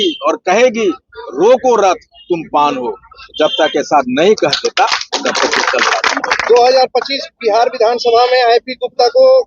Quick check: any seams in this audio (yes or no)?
yes